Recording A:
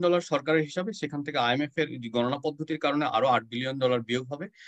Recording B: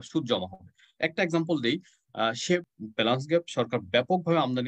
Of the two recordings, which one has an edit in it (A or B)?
B